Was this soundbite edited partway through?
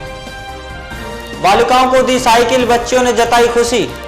yes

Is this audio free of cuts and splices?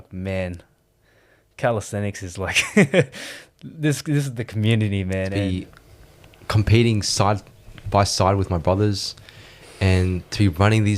no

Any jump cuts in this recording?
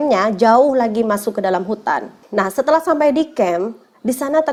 no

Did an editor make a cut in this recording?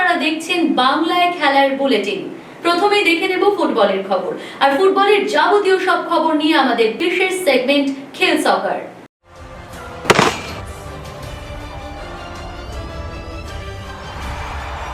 yes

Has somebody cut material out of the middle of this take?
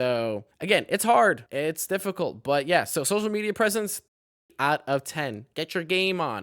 yes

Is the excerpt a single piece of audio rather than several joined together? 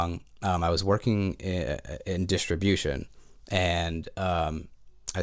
yes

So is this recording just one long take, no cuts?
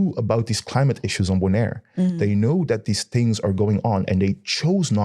yes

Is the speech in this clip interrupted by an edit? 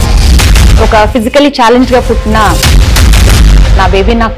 no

